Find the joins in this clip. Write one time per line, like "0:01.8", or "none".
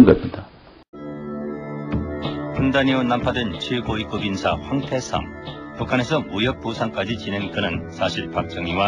0:03.8